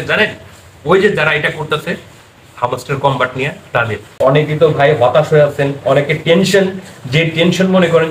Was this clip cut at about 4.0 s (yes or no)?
yes